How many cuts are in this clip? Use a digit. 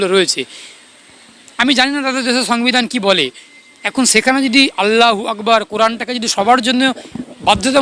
0